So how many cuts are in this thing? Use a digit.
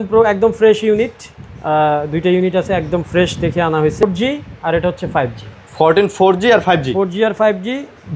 1